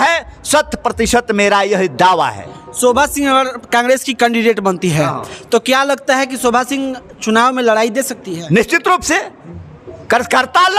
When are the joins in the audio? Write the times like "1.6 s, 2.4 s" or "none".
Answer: none